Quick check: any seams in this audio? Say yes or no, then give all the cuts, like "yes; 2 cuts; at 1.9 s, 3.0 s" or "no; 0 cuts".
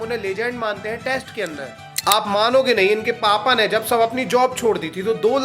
yes; 1 cut; at 1.8 s